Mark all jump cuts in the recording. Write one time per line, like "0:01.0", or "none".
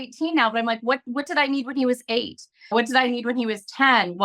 none

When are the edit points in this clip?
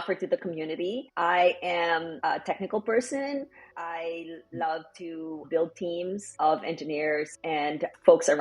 0:01.1
0:02.1
0:03.7
0:05.4
0:06.3

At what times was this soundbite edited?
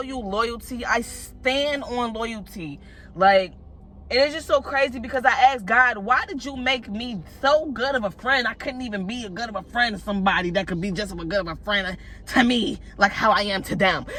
none

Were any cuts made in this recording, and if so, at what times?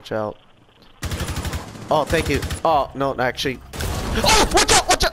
none

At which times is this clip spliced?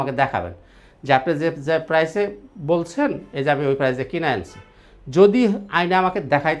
none

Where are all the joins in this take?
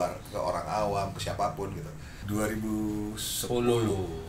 0:02.1

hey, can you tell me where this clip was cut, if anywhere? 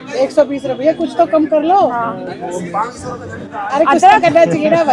none

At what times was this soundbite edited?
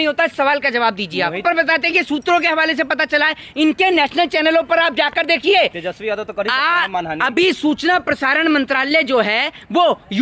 0:01.4

